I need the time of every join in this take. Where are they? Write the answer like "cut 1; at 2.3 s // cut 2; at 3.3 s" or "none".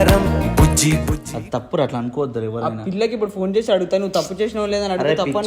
cut 1; at 1.3 s